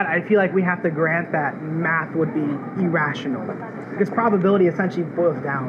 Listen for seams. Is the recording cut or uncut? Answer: uncut